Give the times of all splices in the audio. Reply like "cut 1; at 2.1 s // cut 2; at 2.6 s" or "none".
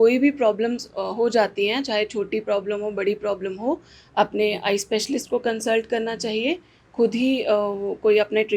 none